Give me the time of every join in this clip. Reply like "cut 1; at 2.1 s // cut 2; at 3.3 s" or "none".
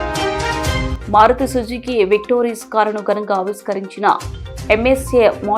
cut 1; at 0.9 s